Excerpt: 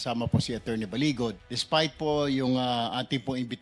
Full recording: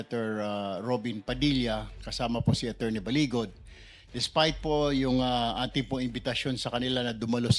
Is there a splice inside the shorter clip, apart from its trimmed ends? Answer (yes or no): yes